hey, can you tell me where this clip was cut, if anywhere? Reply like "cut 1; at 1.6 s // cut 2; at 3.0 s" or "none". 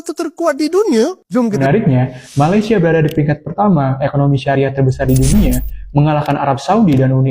cut 1; at 1.6 s